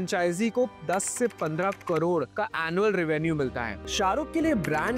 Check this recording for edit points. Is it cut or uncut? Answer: cut